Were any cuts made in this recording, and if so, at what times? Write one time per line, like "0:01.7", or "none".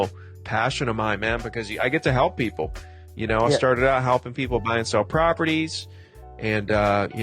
none